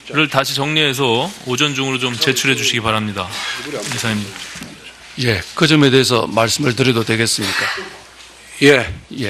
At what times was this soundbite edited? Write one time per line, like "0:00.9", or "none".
0:01.3